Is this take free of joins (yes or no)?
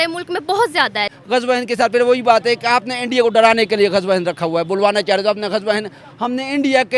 no